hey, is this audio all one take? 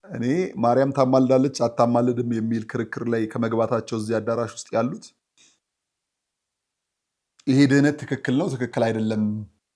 yes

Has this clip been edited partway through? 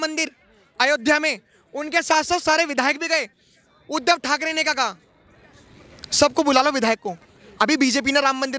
no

